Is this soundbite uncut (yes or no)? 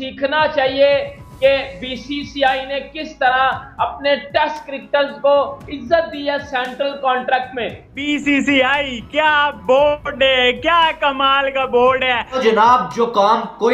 no